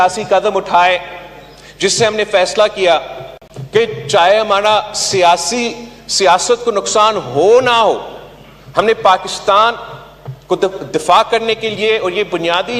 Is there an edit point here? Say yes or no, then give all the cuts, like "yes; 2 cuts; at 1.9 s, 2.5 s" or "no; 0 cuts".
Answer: no; 0 cuts